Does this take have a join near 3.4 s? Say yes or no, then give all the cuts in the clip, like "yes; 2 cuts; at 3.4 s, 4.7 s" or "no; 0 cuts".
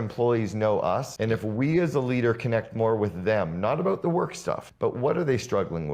no; 2 cuts; at 1.1 s, 4.7 s